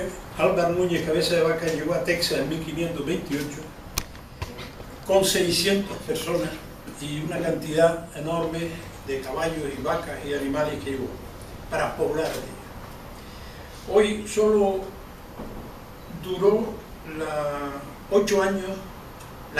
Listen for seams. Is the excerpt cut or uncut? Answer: uncut